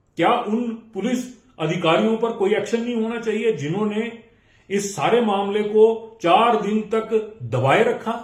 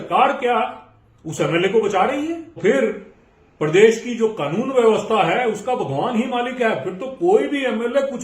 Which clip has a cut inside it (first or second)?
second